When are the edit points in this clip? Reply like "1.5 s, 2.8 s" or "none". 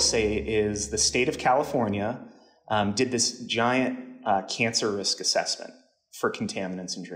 none